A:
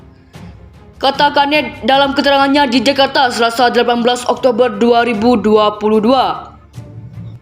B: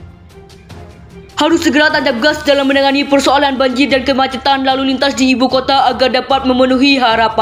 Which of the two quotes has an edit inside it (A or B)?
A